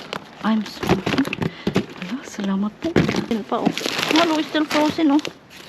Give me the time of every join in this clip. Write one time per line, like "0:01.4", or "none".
0:03.3